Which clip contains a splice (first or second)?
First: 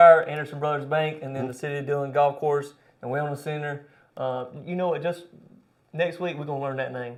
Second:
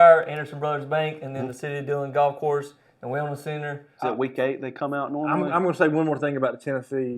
second